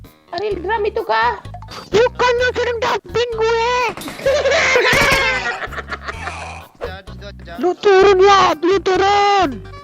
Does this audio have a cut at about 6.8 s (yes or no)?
yes